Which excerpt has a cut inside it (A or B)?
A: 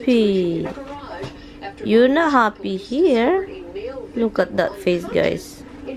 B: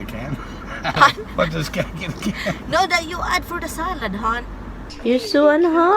B